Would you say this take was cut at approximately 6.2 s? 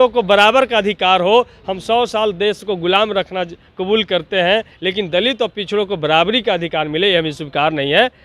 no; 1 cut; at 4.8 s

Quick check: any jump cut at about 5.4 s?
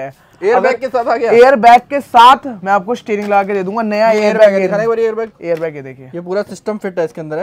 no; 0 cuts

